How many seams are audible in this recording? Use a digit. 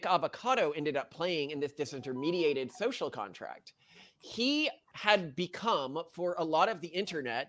1